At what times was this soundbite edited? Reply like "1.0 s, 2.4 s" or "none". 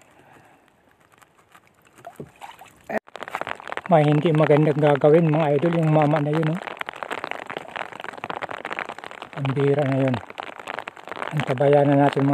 3.0 s